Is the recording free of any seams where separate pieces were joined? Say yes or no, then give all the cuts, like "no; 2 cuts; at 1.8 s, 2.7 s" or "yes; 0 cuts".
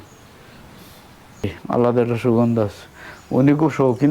no; 1 cut; at 1.6 s